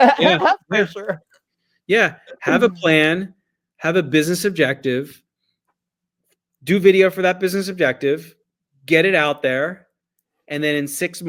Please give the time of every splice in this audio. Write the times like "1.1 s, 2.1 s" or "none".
none